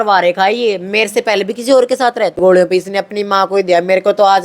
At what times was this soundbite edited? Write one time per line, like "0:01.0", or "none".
0:02.4

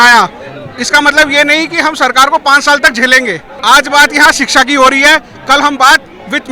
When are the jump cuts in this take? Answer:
0:03.5

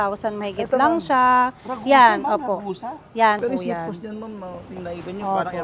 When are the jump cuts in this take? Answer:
0:03.4

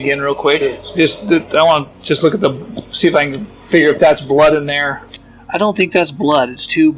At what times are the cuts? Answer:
none

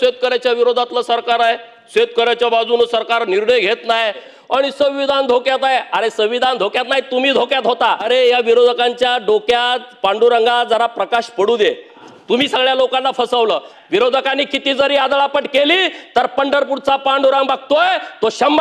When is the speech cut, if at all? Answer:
0:04.3
0:08.0
0:12.0
0:13.7

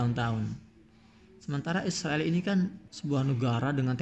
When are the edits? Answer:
0:02.9

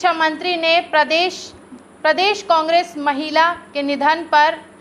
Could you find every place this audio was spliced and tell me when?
none

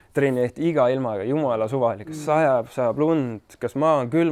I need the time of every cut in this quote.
none

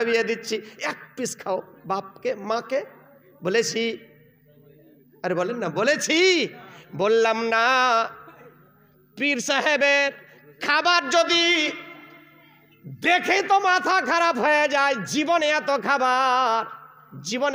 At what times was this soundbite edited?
none

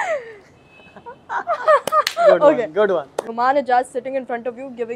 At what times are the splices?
0:03.2

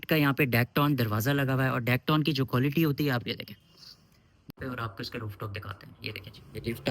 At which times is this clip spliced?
0:04.5

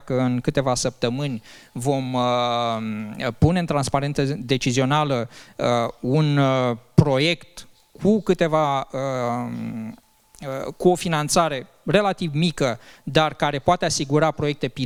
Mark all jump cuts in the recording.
none

